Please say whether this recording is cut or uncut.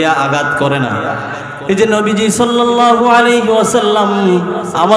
uncut